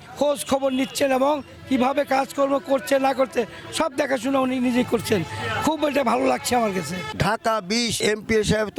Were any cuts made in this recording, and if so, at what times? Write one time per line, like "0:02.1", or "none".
0:07.1
0:08.0